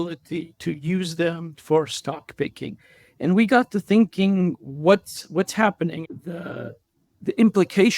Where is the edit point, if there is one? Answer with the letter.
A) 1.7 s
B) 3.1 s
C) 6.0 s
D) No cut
C